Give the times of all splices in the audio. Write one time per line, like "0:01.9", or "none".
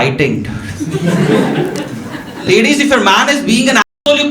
0:02.4